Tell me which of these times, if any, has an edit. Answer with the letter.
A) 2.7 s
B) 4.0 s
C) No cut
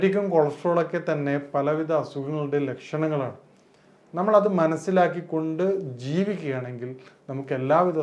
C